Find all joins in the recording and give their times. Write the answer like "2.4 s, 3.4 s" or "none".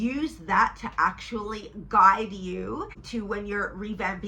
3.0 s